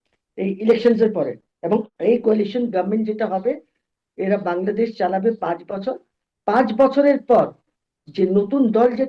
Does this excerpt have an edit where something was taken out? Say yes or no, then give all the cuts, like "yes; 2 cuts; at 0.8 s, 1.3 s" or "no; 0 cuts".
yes; 1 cut; at 1.9 s